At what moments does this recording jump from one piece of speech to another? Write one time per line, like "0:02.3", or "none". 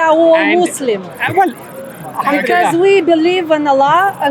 none